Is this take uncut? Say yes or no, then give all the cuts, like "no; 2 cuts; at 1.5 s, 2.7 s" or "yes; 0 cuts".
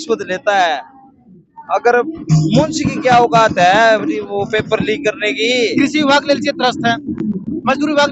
no; 1 cut; at 5.6 s